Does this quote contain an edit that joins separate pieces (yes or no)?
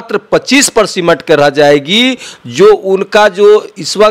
no